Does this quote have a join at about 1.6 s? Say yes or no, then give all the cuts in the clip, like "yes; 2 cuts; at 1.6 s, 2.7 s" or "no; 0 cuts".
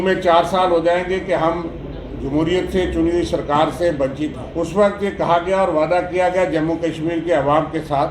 no; 1 cut; at 4.4 s